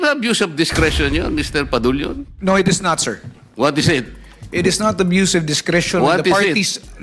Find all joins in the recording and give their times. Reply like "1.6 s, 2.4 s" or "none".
2.3 s

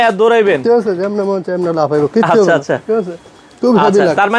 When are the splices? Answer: none

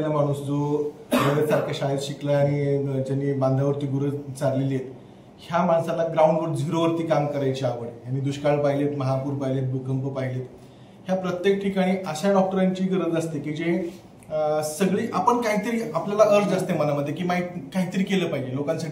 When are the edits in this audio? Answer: none

